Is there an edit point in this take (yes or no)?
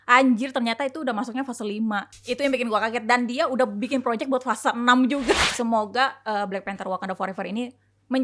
yes